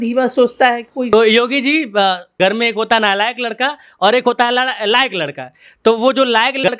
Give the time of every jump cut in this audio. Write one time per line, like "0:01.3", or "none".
0:01.1
0:02.4

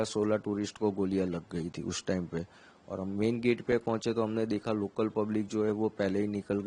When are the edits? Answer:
none

